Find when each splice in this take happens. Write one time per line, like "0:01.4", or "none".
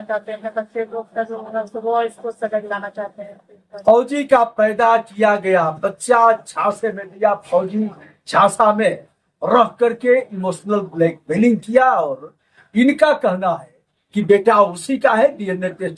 none